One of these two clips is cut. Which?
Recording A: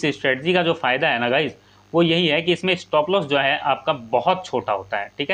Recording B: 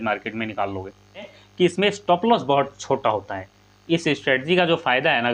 B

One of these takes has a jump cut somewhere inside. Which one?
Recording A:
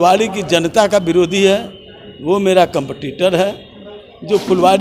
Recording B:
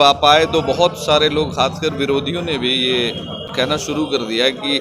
B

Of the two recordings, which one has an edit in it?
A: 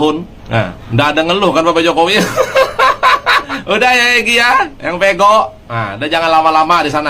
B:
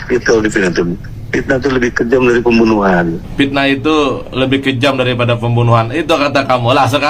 A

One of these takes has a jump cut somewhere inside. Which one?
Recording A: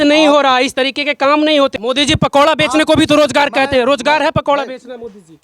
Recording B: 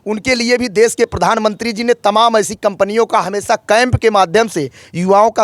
A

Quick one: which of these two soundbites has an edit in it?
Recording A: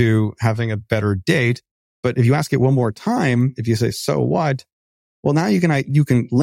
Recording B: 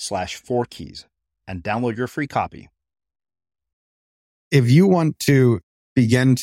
B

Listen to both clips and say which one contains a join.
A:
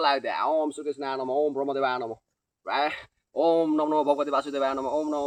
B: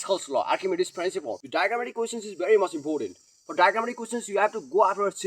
B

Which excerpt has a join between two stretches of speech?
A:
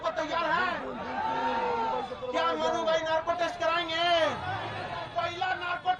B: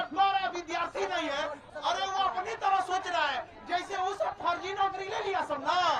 B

